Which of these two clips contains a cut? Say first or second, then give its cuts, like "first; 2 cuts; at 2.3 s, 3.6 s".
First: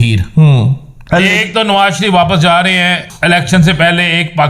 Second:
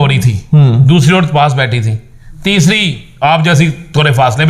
first; 2 cuts; at 0.9 s, 3.1 s